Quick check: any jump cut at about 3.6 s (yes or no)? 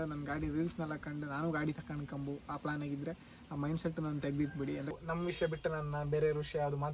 no